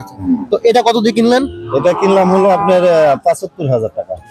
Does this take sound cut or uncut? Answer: uncut